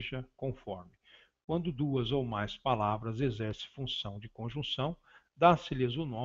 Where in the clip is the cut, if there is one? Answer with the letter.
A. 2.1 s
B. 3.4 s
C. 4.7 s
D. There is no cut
B